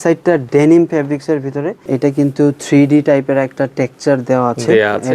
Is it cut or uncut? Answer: cut